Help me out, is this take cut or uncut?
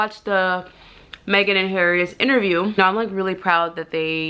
cut